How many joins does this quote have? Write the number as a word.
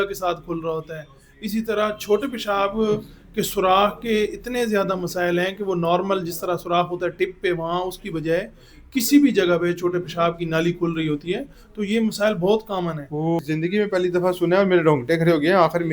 one